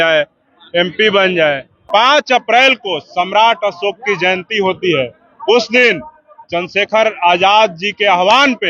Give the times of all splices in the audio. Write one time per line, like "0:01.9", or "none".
0:01.8